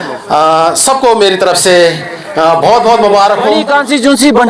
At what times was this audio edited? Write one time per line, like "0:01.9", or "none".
0:03.6